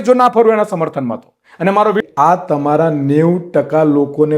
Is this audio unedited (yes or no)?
no